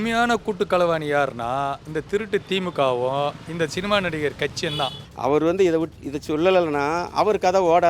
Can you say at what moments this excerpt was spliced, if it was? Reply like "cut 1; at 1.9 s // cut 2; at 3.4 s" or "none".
cut 1; at 5.0 s